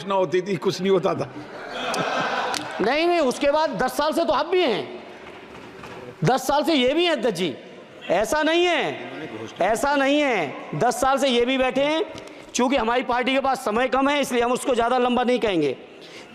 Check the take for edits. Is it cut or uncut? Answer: uncut